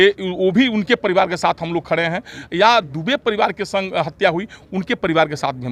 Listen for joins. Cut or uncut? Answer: uncut